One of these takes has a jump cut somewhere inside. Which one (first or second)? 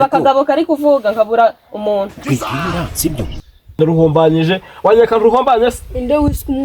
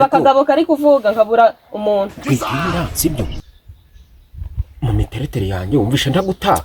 first